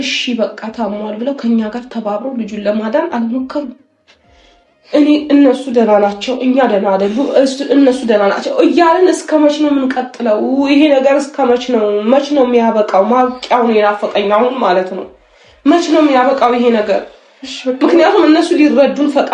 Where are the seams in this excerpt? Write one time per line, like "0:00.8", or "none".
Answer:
none